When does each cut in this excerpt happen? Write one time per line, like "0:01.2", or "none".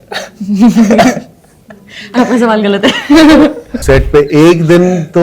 0:03.7